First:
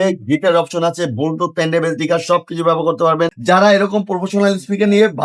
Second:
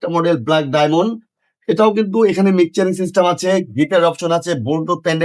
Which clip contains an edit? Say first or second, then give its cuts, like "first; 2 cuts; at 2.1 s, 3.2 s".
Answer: first; 1 cut; at 3.4 s